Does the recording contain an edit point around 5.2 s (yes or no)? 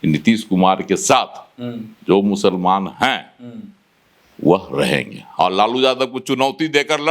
yes